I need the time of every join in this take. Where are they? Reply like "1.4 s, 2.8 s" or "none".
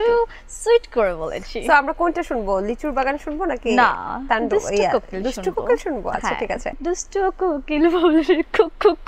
6.8 s